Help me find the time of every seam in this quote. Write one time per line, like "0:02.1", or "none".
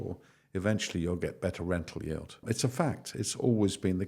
0:02.4